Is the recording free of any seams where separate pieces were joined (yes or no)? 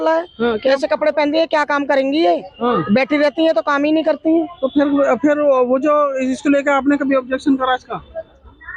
yes